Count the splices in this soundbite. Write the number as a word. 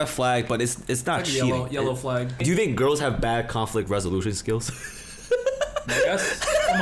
one